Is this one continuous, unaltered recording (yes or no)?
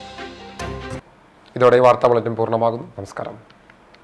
yes